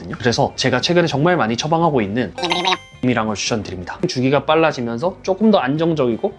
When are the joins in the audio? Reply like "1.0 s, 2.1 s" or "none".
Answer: 4.0 s